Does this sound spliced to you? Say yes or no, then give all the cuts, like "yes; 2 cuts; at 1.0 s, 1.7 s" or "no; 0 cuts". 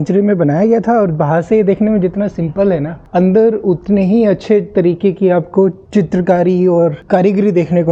no; 0 cuts